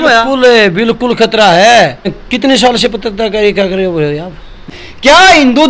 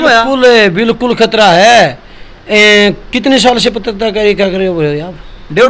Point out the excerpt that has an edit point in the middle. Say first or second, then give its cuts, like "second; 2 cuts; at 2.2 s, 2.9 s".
first; 2 cuts; at 2.2 s, 4.7 s